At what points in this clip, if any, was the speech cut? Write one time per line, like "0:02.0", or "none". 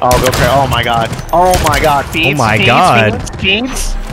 none